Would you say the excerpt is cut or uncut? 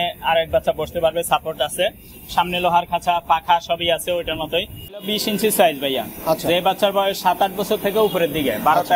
cut